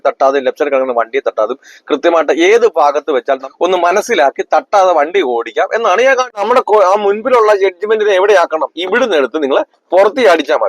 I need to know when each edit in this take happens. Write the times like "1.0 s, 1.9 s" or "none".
3.5 s, 6.4 s